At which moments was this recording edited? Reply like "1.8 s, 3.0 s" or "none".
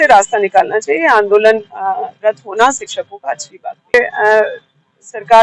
3.9 s